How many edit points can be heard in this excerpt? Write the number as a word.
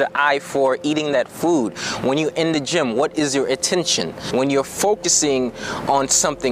one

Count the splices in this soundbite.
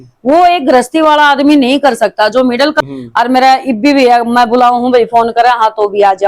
one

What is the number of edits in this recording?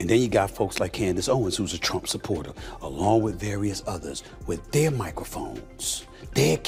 zero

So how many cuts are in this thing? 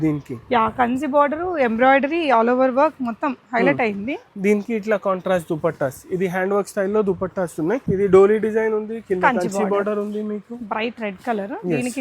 one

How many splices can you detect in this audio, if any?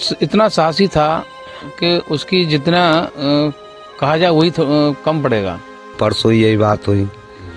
one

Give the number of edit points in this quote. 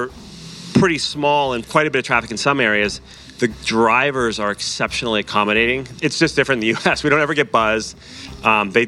two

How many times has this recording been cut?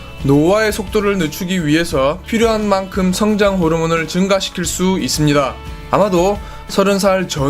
one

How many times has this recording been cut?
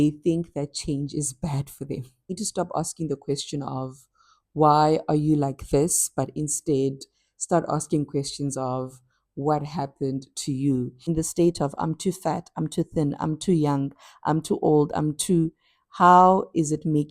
two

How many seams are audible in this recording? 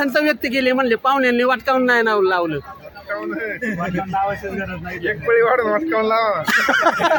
zero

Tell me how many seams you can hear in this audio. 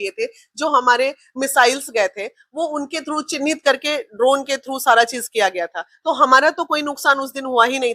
zero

